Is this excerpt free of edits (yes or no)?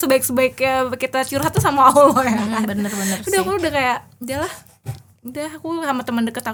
yes